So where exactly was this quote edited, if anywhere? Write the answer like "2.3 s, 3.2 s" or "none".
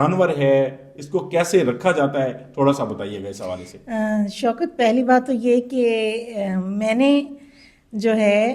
none